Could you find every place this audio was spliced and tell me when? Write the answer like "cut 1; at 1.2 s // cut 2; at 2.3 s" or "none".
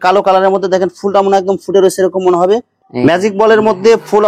cut 1; at 2.8 s